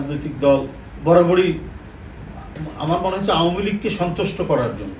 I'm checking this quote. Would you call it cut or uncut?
uncut